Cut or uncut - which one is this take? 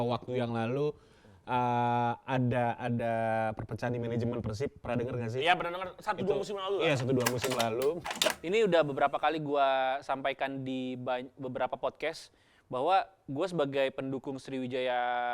cut